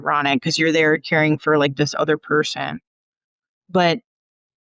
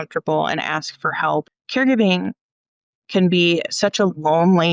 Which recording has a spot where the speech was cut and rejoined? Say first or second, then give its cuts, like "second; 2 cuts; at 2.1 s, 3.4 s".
second; 1 cut; at 1.6 s